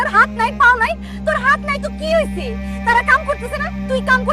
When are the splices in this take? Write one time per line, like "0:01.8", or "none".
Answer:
none